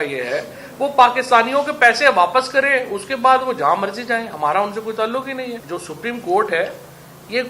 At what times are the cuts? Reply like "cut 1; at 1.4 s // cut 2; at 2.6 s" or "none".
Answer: cut 1; at 5.6 s